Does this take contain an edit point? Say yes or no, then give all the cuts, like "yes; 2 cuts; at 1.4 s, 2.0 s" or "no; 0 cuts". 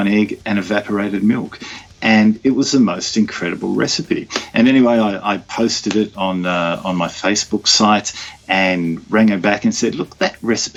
no; 0 cuts